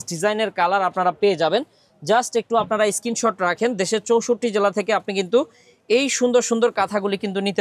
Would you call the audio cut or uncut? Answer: uncut